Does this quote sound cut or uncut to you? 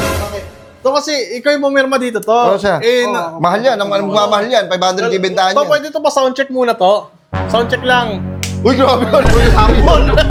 uncut